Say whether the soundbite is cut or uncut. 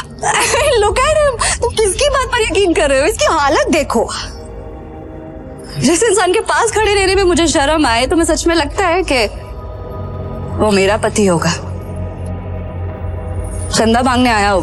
uncut